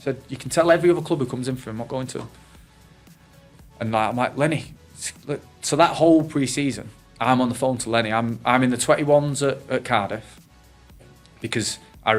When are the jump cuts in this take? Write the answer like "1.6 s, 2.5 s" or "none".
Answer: none